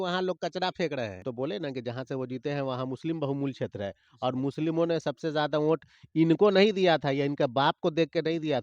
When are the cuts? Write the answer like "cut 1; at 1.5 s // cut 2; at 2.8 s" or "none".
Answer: cut 1; at 1.2 s